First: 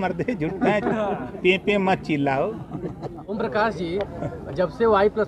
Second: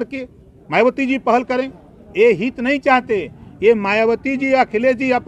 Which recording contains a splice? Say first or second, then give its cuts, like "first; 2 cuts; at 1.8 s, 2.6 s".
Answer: first; 1 cut; at 3.2 s